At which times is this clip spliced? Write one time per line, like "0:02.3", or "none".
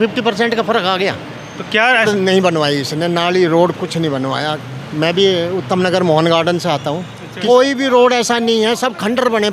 0:02.1
0:07.3